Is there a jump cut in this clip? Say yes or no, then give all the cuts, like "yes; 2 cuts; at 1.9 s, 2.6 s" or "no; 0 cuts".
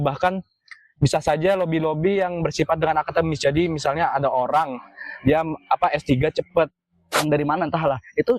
yes; 1 cut; at 7.1 s